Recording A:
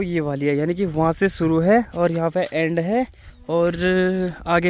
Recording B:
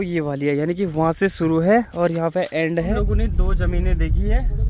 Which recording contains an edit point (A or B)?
B